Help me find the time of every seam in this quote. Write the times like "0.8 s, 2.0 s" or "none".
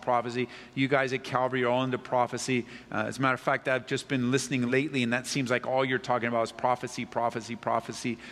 4.7 s